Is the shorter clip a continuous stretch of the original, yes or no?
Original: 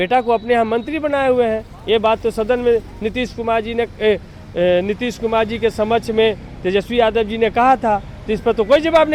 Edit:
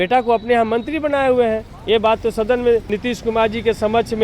no